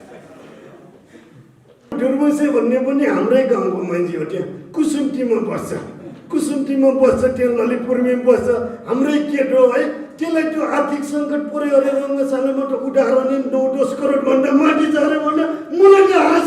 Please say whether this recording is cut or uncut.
cut